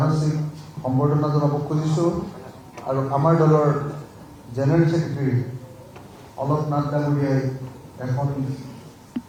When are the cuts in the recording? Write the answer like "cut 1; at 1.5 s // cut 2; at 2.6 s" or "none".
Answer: none